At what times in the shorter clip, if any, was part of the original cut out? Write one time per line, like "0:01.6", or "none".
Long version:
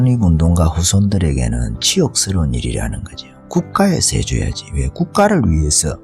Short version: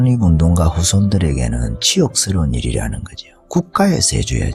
none